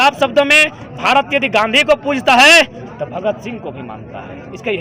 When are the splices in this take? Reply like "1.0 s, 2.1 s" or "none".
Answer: none